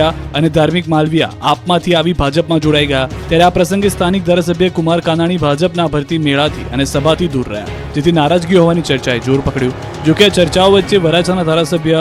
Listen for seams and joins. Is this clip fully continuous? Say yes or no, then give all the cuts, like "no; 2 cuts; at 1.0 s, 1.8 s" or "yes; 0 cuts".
yes; 0 cuts